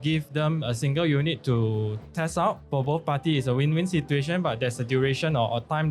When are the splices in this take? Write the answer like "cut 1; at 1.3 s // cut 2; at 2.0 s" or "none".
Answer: cut 1; at 2.6 s